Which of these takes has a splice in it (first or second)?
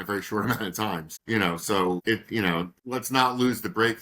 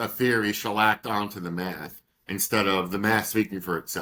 first